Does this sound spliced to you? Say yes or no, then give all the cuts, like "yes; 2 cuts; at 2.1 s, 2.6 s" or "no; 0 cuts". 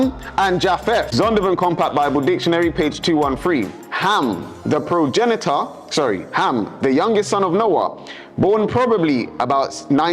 yes; 1 cut; at 1.1 s